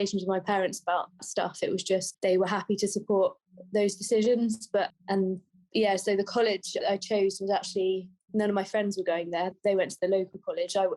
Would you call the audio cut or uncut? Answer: cut